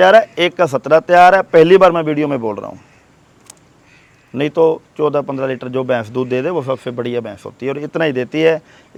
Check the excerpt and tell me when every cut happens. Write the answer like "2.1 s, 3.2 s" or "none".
none